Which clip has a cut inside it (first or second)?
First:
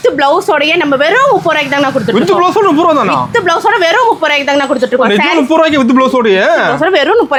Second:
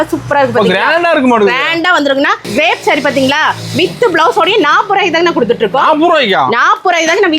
second